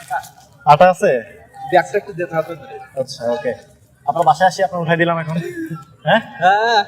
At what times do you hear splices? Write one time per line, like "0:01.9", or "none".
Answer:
none

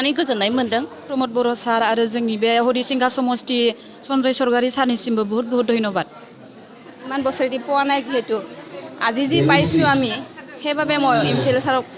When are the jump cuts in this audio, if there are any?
0:01.1
0:04.0
0:07.1

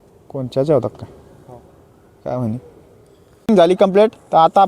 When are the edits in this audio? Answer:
0:03.5

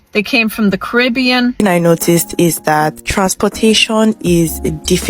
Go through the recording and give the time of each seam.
0:01.6

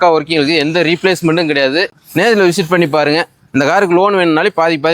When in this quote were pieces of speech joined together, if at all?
0:02.0

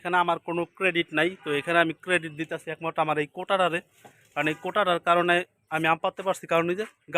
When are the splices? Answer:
none

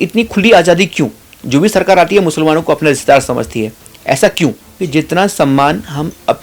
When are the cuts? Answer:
0:04.7

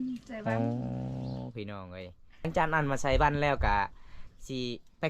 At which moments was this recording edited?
0:02.5

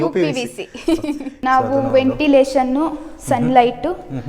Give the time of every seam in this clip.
0:01.3

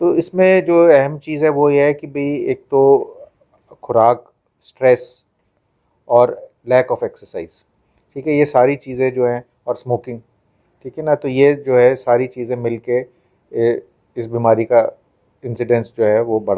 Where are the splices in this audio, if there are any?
none

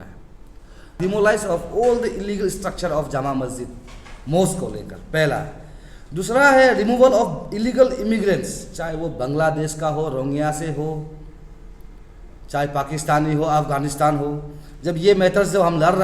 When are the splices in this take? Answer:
0:01.0

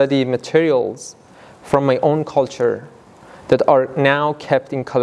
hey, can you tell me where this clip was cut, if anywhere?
none

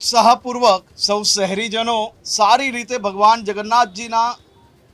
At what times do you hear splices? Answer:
0:00.9
0:02.2

